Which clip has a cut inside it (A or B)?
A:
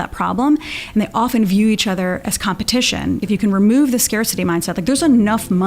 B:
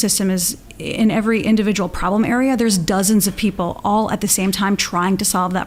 A